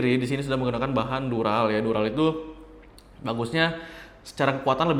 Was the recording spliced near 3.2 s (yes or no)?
no